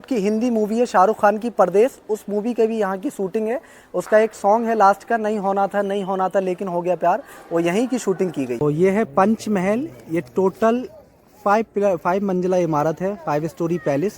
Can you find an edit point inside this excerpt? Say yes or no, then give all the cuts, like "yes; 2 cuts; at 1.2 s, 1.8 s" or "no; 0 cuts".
yes; 1 cut; at 8.6 s